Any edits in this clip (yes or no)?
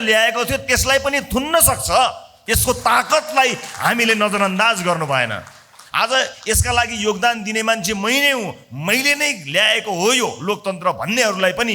no